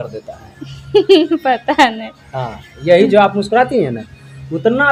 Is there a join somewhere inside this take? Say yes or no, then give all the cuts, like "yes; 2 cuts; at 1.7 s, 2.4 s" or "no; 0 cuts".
no; 0 cuts